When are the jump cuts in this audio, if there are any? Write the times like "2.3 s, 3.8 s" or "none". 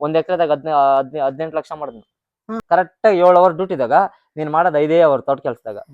2.6 s